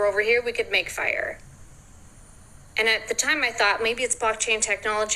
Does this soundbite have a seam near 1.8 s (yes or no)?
no